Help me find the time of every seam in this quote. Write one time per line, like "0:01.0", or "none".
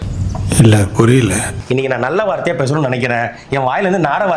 0:01.5